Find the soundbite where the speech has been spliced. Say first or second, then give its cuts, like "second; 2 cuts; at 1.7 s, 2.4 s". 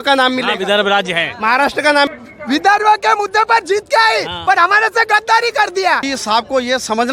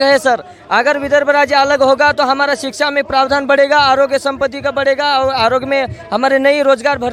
first; 2 cuts; at 2.1 s, 6.0 s